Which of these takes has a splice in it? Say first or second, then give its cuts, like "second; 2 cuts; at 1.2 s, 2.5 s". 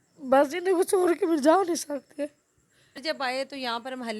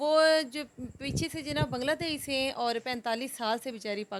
first; 1 cut; at 3.0 s